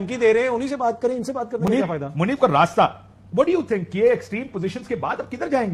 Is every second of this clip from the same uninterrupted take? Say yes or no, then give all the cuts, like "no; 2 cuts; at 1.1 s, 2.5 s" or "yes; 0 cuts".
yes; 0 cuts